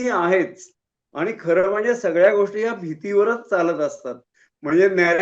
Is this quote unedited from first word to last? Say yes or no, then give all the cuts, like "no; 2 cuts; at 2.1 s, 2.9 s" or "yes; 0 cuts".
yes; 0 cuts